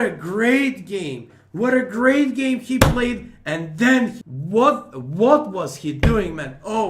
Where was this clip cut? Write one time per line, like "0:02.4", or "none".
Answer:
0:04.3